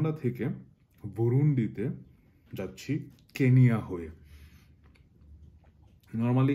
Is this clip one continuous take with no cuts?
yes; 0 cuts

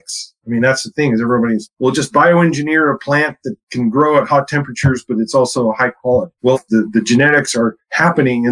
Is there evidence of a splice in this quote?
yes; 1 cut; at 6.5 s

